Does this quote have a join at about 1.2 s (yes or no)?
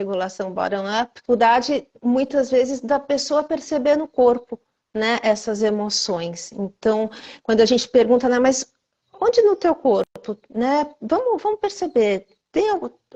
yes